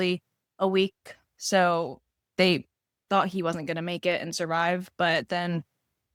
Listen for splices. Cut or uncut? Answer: uncut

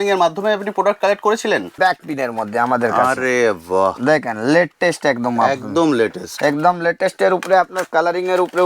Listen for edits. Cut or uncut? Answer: cut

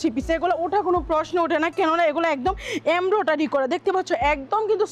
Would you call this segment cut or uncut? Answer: uncut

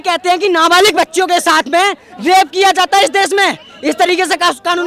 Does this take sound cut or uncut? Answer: uncut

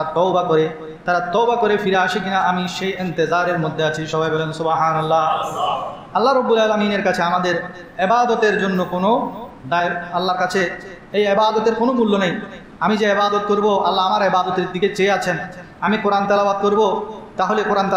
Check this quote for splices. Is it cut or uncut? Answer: uncut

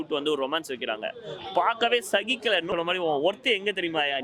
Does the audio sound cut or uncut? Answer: cut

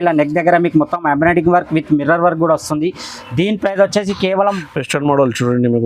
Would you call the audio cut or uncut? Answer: cut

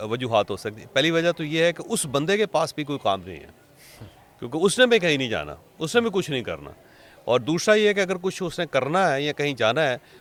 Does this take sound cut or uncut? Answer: uncut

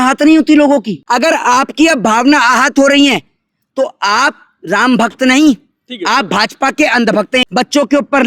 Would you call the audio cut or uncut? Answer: cut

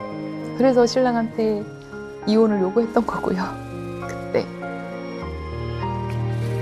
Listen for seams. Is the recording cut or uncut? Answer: uncut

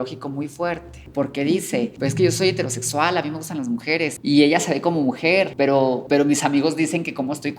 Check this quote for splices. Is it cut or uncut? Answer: cut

